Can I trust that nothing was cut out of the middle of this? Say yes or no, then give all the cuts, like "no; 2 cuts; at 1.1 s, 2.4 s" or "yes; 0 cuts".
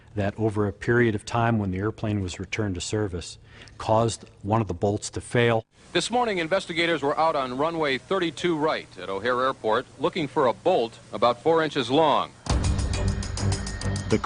no; 1 cut; at 3.4 s